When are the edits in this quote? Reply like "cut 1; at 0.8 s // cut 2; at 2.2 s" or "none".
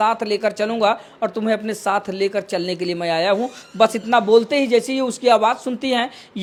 none

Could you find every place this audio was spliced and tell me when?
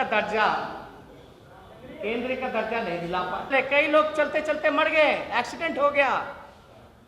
cut 1; at 3.5 s

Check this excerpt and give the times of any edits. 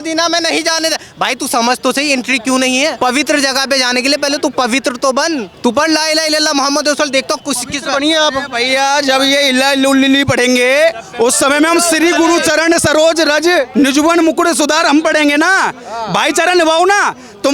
cut 1; at 3.0 s // cut 2; at 5.5 s // cut 3; at 13.7 s

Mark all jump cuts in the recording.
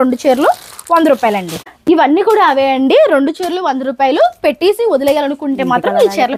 none

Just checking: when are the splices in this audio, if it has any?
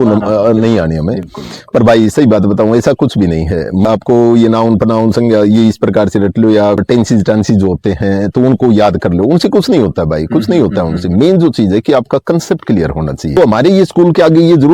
cut 1; at 3.8 s // cut 2; at 6.8 s // cut 3; at 13.3 s

